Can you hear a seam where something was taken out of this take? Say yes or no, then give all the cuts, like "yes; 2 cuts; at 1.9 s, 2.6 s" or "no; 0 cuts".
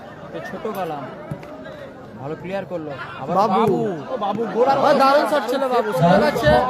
no; 0 cuts